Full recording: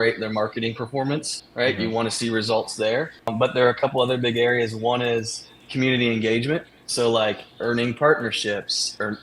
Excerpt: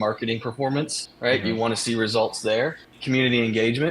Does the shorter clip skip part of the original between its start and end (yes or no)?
yes